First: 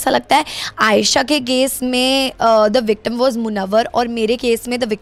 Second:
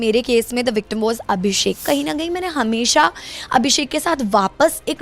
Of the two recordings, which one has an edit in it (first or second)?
second